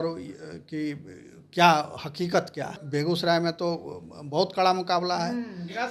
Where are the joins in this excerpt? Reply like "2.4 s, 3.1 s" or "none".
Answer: 2.8 s